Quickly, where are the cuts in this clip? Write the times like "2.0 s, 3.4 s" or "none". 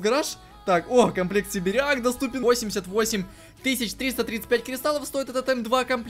2.4 s